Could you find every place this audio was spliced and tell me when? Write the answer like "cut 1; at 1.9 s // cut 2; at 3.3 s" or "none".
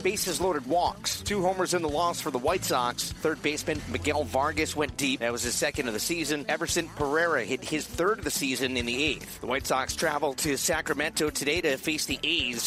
none